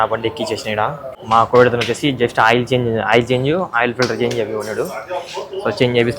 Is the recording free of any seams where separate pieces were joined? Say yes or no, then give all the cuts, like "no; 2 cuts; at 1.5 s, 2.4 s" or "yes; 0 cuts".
no; 1 cut; at 1.1 s